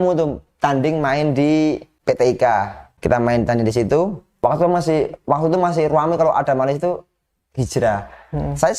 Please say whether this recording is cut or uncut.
cut